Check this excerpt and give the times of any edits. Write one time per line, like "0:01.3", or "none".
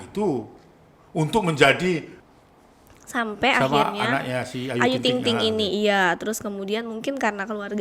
0:02.1